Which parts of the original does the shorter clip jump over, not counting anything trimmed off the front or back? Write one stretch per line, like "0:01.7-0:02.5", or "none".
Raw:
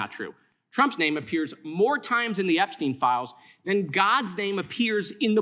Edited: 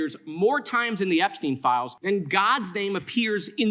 0:03.3-0:03.6